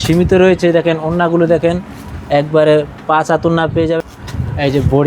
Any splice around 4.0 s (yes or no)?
yes